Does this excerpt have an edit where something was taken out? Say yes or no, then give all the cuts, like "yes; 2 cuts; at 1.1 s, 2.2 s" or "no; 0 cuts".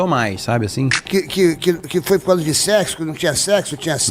yes; 1 cut; at 0.9 s